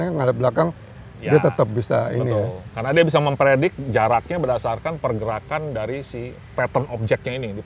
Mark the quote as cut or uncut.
uncut